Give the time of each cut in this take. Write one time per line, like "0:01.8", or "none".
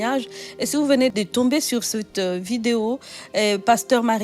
0:01.1